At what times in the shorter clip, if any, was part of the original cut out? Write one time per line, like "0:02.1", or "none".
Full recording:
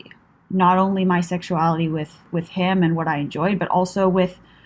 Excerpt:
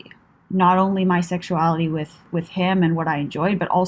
none